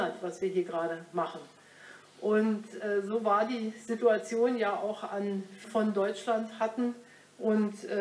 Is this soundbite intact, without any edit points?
yes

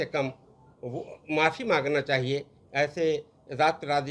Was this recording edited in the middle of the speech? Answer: no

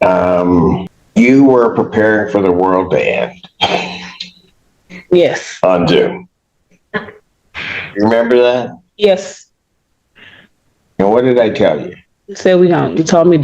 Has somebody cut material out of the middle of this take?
yes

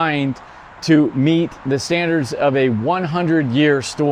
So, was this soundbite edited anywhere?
no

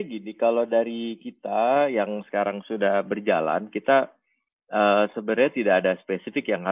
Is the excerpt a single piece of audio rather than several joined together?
yes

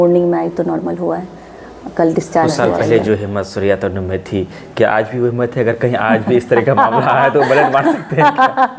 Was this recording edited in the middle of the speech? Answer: yes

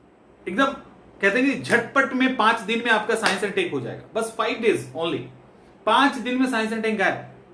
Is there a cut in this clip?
no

